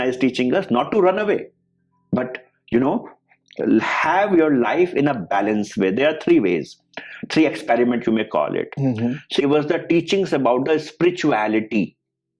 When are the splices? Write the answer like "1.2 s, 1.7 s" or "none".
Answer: 9.4 s